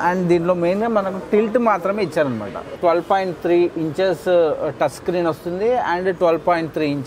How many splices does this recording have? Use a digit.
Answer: 1